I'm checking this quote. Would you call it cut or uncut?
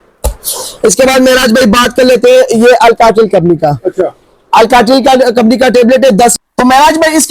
cut